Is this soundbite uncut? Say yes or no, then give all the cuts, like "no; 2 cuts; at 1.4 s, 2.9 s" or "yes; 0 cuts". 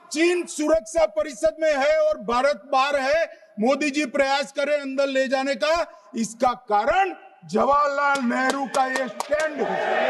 yes; 0 cuts